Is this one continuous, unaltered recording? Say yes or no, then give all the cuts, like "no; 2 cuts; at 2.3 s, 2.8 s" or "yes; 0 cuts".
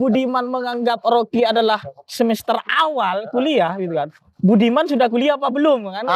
yes; 0 cuts